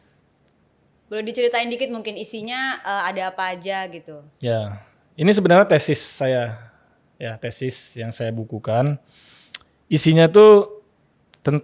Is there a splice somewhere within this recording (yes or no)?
no